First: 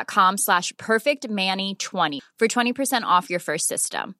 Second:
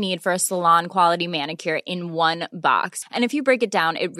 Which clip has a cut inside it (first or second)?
first